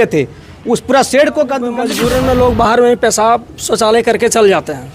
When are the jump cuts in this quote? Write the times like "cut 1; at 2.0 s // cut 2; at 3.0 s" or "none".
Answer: cut 1; at 1.9 s